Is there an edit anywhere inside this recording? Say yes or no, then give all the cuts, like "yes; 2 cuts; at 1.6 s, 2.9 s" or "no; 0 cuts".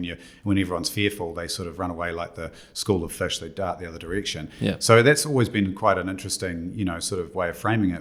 no; 0 cuts